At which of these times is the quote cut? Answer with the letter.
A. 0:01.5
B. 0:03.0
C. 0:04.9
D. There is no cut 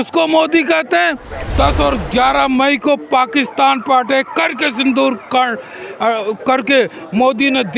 A